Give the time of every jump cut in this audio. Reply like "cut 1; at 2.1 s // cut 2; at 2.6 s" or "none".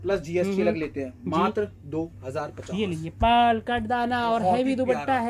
none

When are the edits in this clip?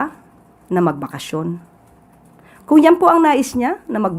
none

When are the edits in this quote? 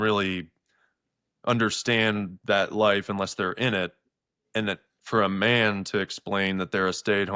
none

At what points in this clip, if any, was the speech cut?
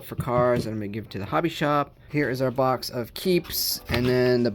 cut 1; at 2.1 s

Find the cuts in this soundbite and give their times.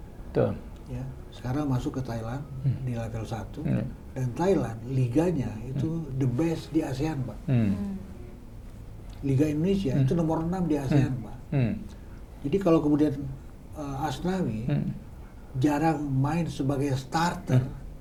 none

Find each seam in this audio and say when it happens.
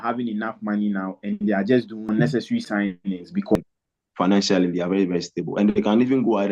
cut 1; at 2.0 s // cut 2; at 3.6 s

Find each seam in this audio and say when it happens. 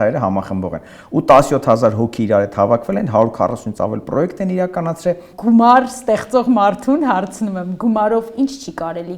cut 1; at 5.3 s

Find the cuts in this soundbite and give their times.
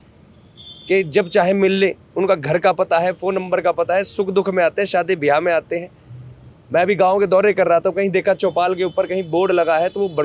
none

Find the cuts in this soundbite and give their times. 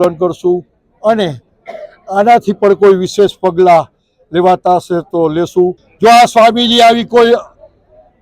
cut 1; at 5.8 s

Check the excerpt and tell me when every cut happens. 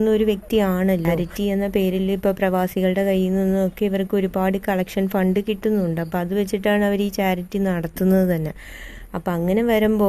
cut 1; at 1.2 s

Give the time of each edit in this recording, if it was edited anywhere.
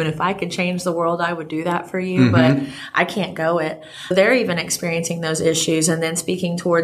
cut 1; at 4.1 s

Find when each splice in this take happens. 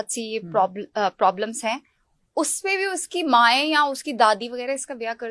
none

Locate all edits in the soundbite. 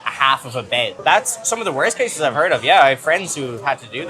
cut 1; at 1.0 s

